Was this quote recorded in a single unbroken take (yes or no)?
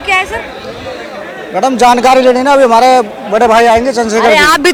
yes